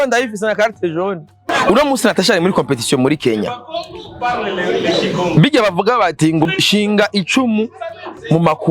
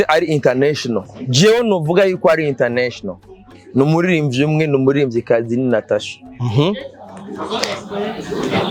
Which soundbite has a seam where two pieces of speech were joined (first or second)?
first